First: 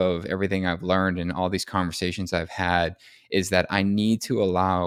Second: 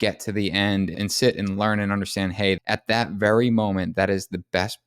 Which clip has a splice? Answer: second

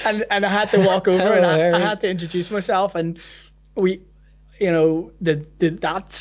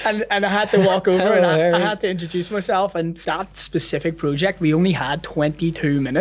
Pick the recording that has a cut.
second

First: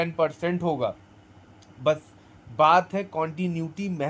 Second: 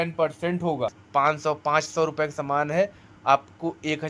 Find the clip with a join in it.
second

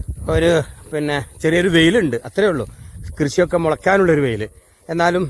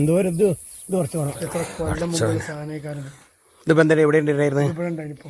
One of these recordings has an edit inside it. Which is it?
second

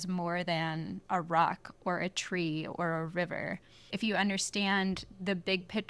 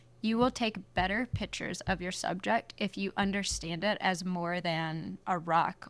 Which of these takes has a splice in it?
first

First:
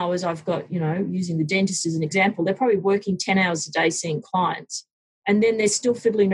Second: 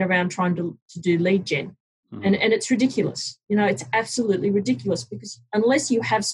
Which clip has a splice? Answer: first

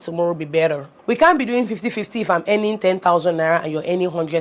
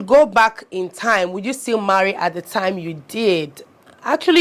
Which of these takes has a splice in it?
first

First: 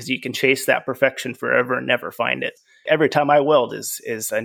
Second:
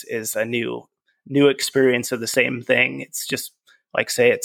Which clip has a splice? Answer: first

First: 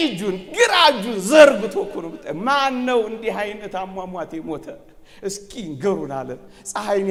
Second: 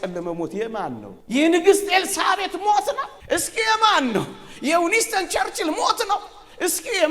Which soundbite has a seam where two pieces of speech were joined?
second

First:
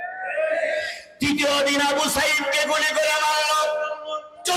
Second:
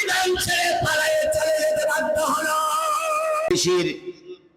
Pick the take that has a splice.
second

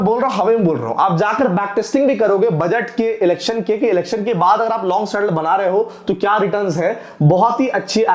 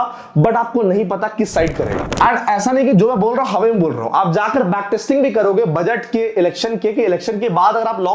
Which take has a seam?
second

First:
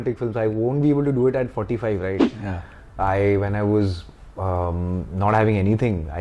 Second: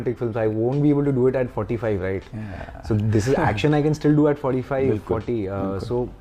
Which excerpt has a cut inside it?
first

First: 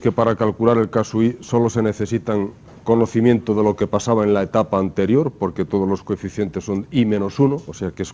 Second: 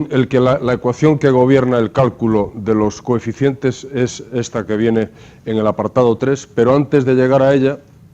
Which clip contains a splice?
second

